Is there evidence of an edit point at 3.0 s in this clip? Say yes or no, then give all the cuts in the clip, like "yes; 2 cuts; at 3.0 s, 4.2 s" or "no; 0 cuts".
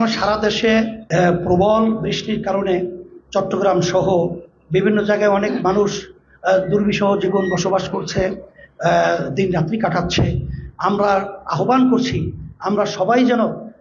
no; 1 cut; at 1.0 s